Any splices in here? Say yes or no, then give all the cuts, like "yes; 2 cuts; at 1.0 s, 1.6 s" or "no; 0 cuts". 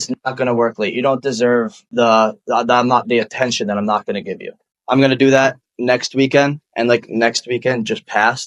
yes; 1 cut; at 4.7 s